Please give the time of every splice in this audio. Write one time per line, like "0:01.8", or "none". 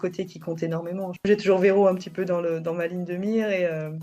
0:01.3

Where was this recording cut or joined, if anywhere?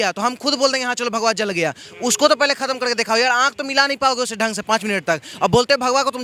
none

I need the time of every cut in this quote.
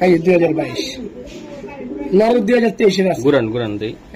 none

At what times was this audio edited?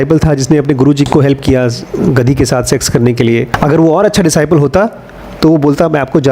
0:01.1

